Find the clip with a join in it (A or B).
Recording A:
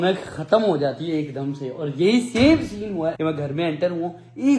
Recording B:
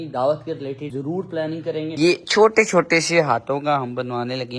B